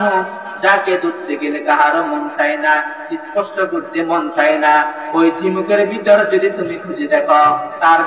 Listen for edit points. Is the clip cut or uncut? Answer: uncut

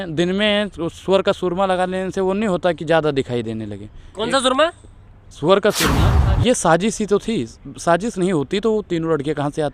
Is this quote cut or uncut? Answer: cut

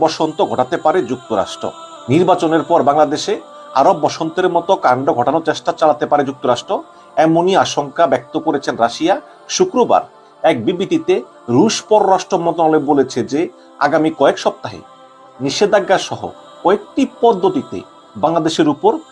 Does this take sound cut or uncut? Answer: uncut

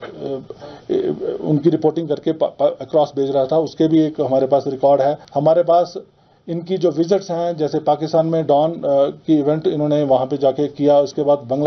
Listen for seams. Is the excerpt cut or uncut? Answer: cut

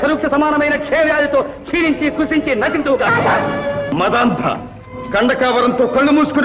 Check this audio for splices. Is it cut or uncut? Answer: cut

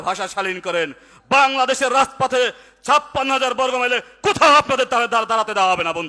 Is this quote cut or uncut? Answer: uncut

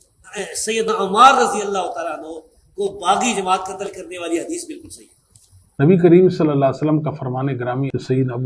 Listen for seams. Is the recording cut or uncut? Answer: cut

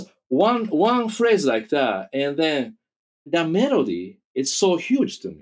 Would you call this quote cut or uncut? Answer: cut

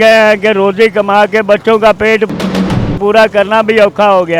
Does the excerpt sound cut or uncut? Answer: uncut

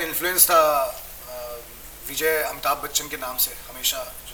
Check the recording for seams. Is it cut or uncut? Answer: uncut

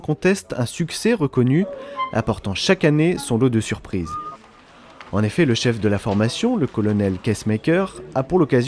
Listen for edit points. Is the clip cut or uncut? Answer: cut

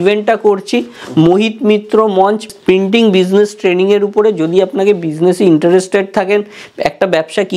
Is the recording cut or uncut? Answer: cut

